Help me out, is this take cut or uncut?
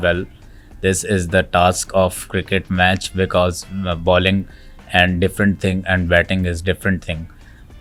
uncut